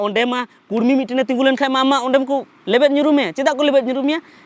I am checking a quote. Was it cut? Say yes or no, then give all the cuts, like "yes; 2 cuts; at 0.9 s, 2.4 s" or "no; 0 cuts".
no; 0 cuts